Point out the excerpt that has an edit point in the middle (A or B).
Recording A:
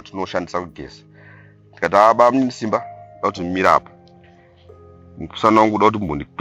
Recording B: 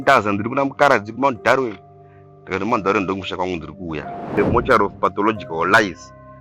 B